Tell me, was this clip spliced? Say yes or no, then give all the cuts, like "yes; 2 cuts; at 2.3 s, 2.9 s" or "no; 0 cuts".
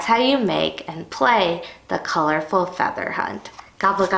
no; 0 cuts